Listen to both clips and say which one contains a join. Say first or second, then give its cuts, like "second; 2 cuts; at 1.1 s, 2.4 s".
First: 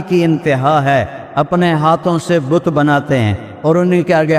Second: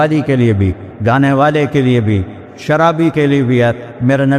first; 1 cut; at 3.4 s